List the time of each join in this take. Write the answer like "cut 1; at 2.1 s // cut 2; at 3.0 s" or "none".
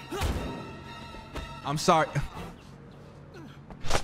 none